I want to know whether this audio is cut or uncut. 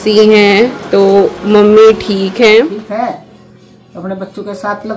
cut